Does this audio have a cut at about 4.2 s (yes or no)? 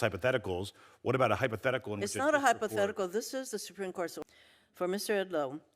yes